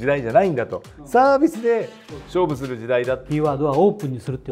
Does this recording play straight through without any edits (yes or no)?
no